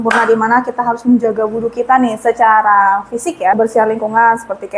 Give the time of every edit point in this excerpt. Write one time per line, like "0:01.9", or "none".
0:03.6